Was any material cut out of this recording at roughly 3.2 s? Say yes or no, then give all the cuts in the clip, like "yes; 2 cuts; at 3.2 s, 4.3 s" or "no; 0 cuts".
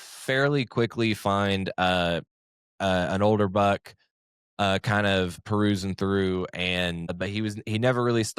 no; 2 cuts; at 5.4 s, 7.1 s